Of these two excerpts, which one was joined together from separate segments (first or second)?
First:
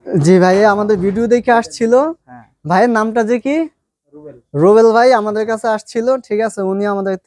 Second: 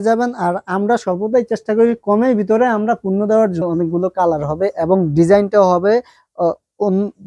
second